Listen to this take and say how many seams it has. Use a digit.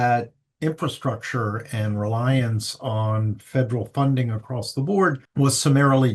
1